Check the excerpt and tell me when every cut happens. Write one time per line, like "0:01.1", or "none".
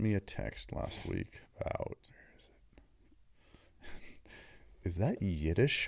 0:02.0